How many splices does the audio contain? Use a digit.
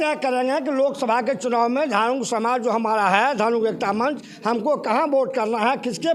0